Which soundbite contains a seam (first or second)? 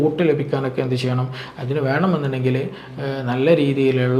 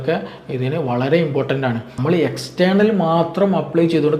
second